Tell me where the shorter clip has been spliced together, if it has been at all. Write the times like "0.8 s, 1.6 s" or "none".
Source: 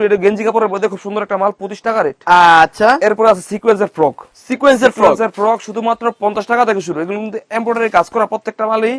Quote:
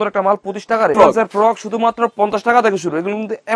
0.9 s